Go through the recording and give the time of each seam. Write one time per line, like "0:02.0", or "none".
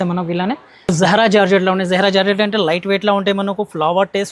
0:00.9